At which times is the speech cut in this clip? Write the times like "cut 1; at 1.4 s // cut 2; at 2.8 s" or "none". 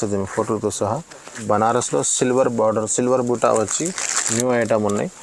cut 1; at 1.4 s